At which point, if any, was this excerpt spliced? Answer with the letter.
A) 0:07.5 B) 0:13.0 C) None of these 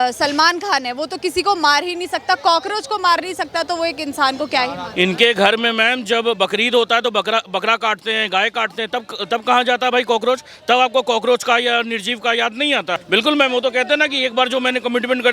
B